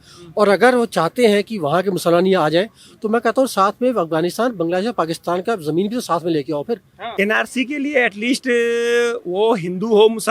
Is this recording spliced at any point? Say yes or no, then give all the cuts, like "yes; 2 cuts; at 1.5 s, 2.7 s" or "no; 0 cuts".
yes; 1 cut; at 7.0 s